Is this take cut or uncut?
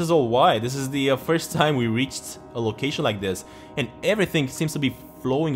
uncut